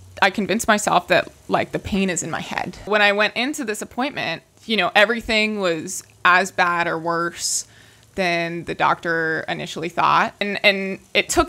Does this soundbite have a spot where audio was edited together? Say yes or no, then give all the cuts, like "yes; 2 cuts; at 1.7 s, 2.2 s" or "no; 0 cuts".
yes; 3 cuts; at 2.9 s, 4.5 s, 10.4 s